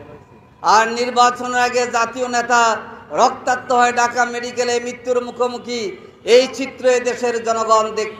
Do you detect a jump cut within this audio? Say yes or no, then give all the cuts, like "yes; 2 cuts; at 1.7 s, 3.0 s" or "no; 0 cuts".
no; 0 cuts